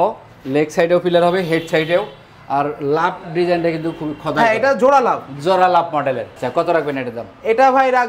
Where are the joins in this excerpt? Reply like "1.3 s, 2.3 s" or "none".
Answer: none